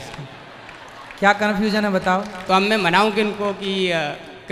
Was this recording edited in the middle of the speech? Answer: no; 0 cuts

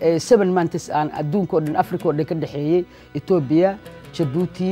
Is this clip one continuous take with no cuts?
yes; 0 cuts

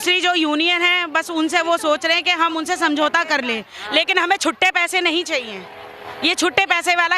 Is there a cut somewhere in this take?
no; 0 cuts

